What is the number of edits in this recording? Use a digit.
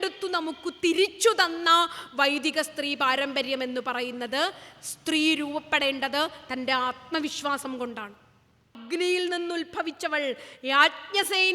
1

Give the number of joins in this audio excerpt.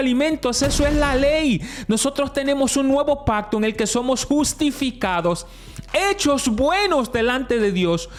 0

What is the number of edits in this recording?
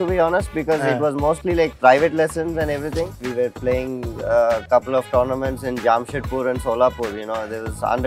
1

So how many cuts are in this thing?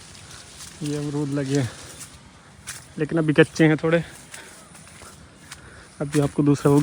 0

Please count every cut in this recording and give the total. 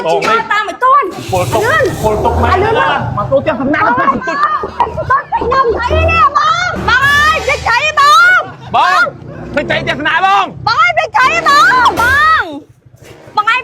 1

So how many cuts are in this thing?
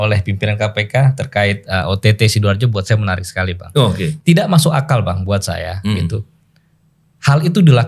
1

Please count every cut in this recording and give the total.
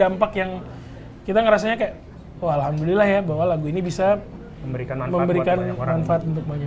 0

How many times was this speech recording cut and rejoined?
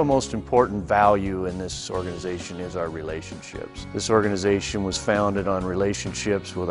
1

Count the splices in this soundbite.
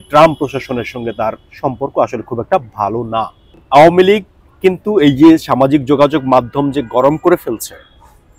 1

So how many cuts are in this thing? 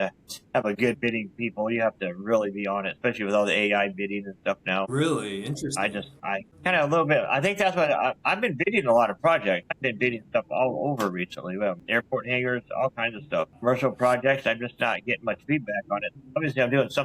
4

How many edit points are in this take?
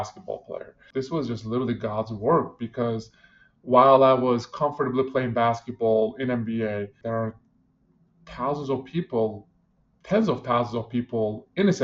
2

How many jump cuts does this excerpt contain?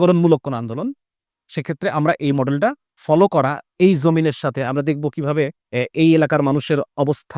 2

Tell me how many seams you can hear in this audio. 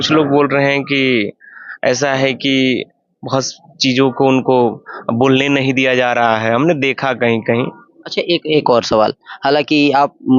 1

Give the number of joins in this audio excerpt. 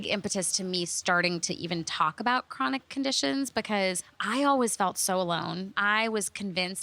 1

